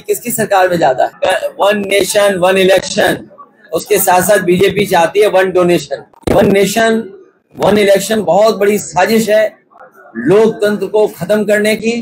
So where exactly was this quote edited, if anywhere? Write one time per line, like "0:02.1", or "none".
0:01.1
0:06.1